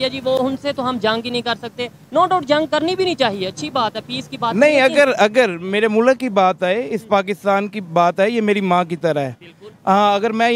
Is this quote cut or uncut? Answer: uncut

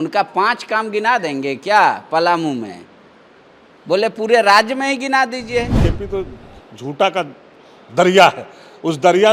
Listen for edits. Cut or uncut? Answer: cut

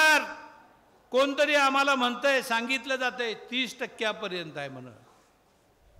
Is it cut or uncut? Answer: uncut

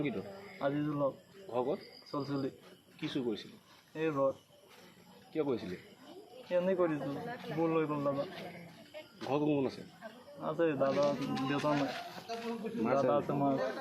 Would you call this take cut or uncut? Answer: uncut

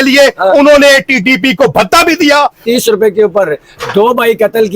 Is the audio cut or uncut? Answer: cut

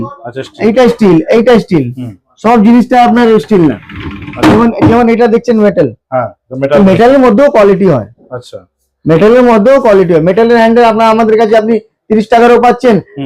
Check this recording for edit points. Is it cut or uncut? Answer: uncut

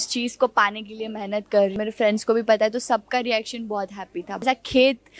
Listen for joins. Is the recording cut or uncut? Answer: cut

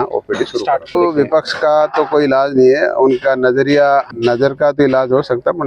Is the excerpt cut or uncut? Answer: cut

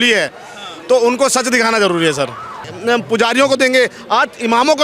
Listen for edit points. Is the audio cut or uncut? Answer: cut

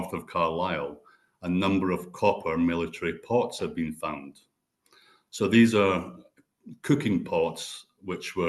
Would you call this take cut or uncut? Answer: uncut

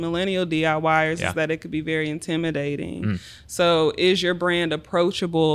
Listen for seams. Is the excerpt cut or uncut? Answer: uncut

